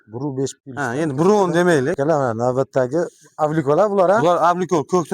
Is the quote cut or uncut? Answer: cut